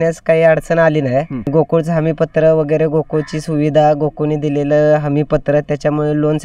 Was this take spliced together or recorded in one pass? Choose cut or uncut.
cut